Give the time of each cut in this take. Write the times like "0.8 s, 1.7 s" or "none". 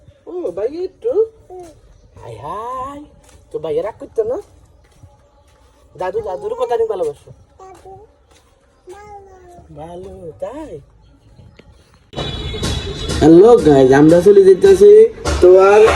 12.1 s